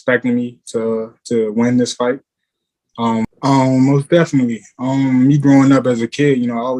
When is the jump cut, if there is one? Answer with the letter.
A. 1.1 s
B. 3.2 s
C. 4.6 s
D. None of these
B